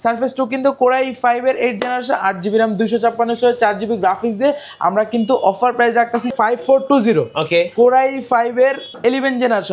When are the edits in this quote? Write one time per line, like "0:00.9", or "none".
0:06.3